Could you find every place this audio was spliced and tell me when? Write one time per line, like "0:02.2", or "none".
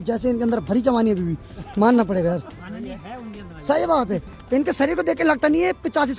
none